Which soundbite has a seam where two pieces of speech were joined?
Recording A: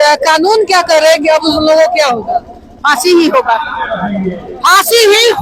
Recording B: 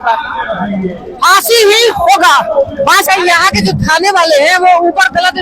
B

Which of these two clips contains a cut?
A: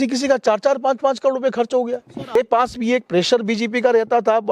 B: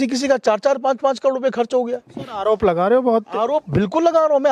A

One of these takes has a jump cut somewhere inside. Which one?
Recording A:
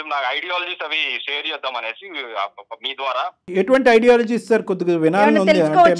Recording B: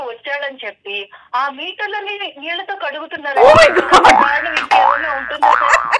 A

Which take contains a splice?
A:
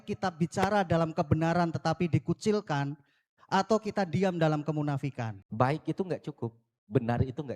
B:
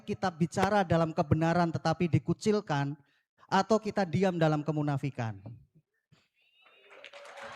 A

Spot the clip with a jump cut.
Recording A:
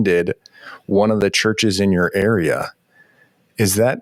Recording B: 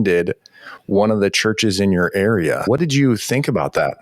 B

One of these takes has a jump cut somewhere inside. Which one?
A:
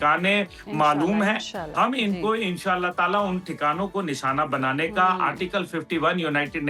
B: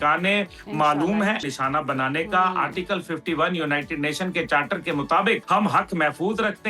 B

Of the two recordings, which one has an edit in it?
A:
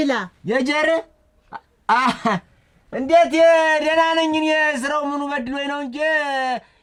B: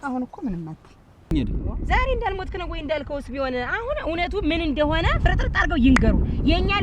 B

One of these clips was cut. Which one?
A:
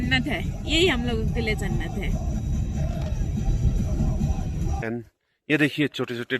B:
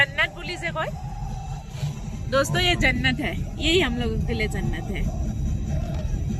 A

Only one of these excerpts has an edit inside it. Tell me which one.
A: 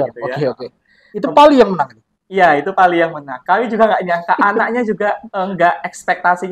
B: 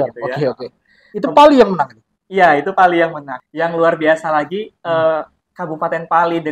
B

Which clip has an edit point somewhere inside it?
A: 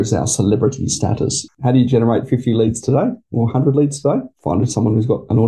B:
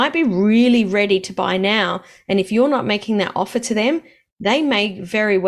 A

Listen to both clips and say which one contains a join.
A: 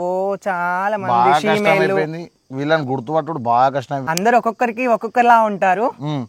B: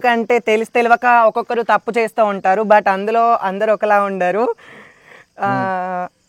A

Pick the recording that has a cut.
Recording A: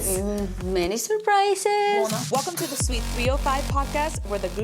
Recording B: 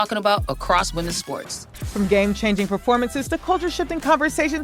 A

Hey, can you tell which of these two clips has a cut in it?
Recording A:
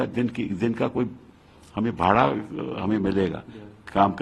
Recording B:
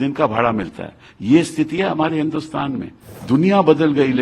B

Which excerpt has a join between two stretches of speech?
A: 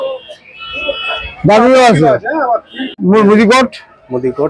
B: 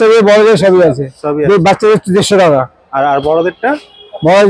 A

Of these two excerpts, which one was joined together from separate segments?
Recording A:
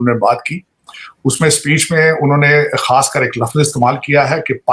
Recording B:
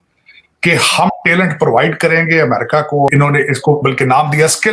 B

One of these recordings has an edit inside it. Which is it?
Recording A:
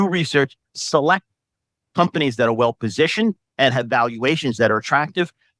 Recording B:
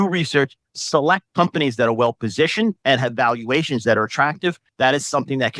B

